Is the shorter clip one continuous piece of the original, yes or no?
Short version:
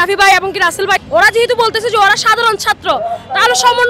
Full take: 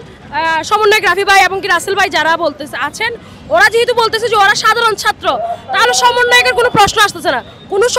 no